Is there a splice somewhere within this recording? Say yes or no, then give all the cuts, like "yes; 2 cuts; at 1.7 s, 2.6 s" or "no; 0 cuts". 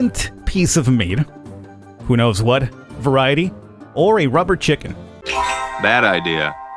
no; 0 cuts